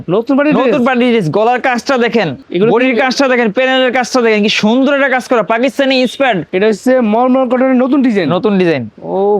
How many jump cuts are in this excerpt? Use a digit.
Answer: 1